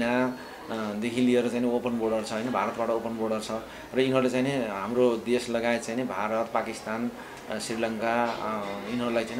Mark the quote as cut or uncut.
uncut